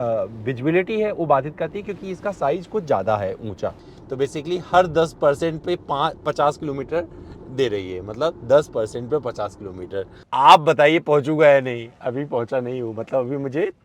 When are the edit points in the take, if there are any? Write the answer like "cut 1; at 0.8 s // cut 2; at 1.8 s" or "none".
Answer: cut 1; at 3.8 s // cut 2; at 10.2 s